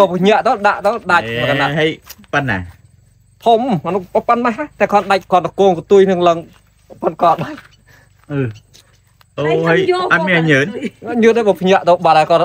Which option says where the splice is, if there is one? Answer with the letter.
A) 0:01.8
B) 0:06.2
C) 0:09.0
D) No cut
D